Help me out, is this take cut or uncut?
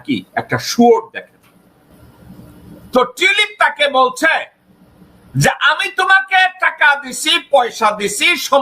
cut